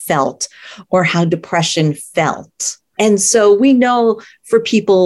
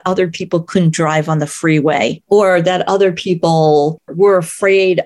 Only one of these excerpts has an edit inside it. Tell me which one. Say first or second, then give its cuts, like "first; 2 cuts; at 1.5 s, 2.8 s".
second; 2 cuts; at 2.2 s, 4.1 s